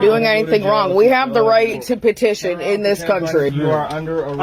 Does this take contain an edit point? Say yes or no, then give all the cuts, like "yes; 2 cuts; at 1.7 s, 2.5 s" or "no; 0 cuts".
yes; 1 cut; at 3.5 s